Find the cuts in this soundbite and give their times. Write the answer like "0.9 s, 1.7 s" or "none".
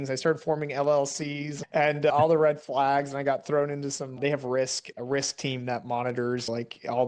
none

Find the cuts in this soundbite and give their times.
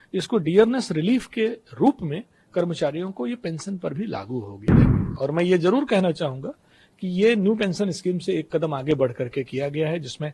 4.8 s

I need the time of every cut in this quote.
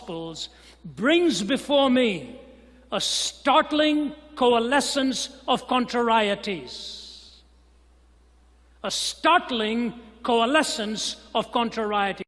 4.9 s

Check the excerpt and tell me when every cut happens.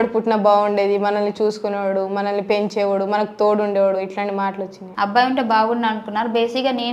4.8 s

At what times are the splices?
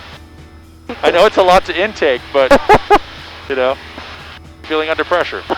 4.7 s

